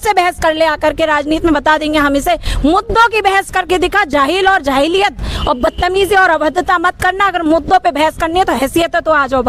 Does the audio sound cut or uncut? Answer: uncut